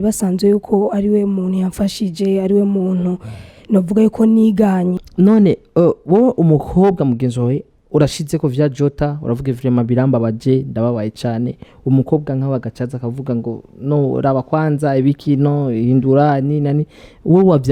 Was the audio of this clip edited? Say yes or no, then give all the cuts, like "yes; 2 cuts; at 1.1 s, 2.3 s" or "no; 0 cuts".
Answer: yes; 1 cut; at 5.0 s